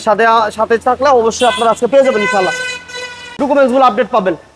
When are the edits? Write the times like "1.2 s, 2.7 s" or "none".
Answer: 3.3 s